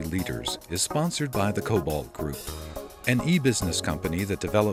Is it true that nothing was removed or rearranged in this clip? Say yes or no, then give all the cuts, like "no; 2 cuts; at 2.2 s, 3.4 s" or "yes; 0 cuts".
yes; 0 cuts